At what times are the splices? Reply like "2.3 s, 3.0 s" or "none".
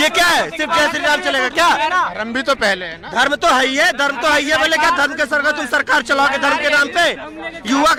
none